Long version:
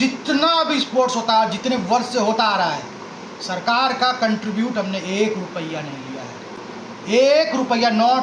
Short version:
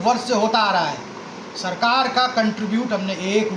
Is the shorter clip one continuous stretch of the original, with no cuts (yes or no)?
yes